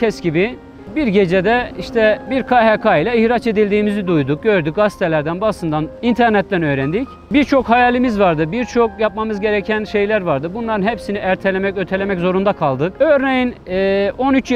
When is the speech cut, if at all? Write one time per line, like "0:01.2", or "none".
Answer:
0:00.9
0:02.2
0:05.9
0:07.2
0:12.9